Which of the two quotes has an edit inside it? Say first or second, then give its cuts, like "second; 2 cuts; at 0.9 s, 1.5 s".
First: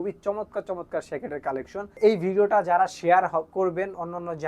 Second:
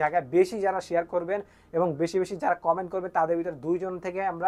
first; 1 cut; at 2.0 s